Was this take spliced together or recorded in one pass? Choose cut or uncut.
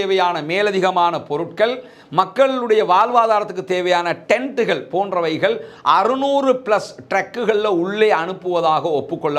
uncut